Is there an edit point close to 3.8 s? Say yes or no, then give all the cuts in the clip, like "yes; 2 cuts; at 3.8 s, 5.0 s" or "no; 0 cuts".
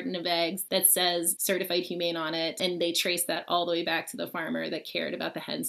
no; 2 cuts; at 1.1 s, 2.6 s